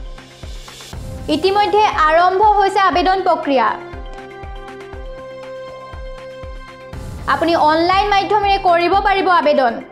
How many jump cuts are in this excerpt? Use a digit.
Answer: 3